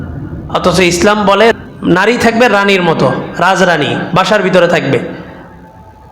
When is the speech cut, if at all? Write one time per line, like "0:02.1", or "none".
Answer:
0:01.6